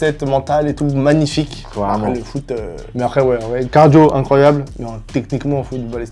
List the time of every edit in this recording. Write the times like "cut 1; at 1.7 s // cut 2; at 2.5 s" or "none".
cut 1; at 2.8 s